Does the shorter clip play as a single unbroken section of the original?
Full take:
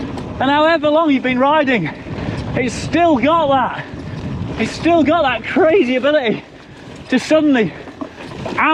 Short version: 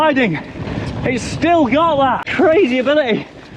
no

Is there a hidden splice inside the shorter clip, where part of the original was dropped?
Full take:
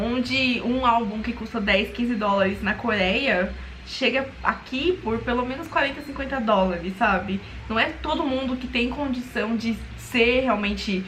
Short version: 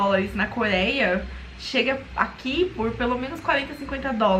no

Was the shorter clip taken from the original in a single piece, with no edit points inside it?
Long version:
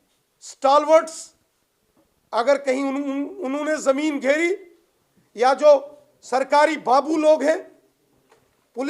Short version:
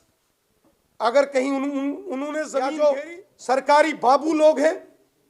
no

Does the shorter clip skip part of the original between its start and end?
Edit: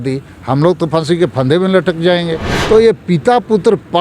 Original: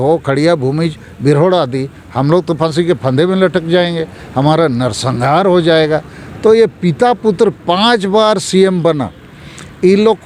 yes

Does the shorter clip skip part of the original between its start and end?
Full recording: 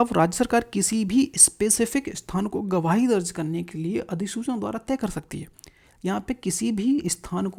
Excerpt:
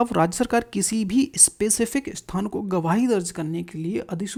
no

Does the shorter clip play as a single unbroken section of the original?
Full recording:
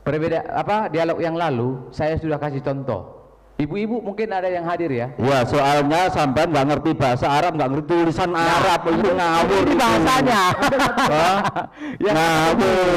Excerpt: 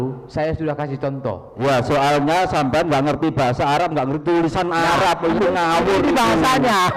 no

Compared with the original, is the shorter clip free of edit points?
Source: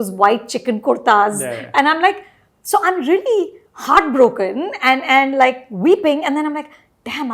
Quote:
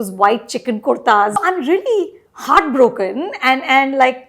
no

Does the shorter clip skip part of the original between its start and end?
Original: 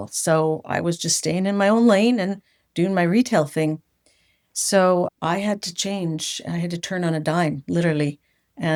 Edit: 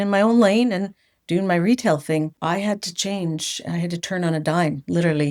yes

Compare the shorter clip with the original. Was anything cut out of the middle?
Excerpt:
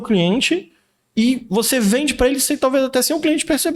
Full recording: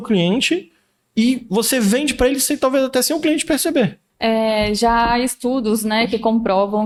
no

